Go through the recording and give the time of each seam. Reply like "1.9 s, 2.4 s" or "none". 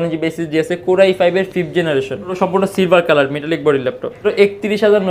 2.3 s, 4.2 s